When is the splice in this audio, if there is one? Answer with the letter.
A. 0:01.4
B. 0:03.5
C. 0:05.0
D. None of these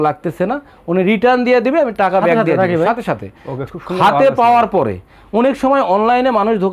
D